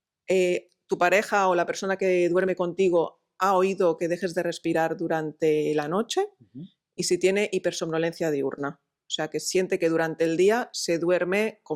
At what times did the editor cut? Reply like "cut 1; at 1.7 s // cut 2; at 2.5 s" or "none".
none